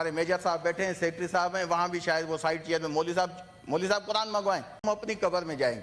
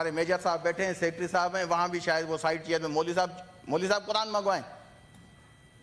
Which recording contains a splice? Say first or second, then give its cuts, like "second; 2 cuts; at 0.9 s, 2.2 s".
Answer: first; 1 cut; at 4.8 s